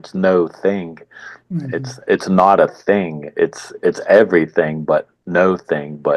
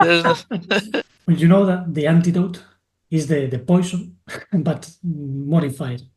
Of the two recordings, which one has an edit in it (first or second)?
second